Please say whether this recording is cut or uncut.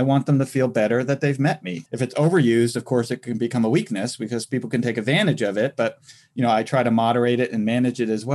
cut